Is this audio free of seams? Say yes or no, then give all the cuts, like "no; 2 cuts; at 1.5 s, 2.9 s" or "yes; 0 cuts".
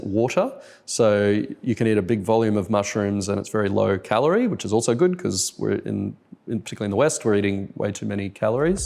yes; 0 cuts